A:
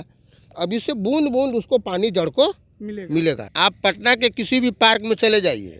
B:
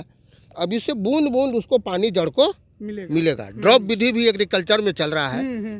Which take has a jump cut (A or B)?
A